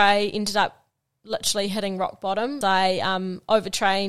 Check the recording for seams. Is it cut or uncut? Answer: cut